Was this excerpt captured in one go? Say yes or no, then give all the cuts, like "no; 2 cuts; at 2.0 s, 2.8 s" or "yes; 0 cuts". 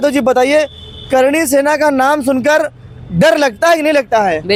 yes; 0 cuts